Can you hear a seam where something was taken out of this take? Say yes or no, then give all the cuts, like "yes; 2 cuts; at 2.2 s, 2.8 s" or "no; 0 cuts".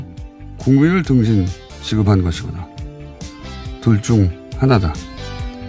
yes; 1 cut; at 2.2 s